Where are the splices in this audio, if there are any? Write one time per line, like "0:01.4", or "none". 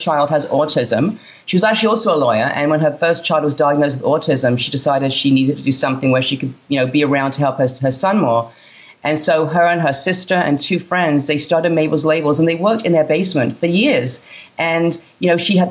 none